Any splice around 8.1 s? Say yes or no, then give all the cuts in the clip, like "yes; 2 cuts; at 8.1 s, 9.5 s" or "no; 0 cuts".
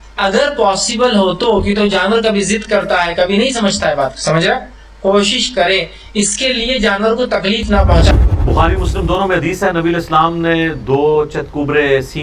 yes; 1 cut; at 8.1 s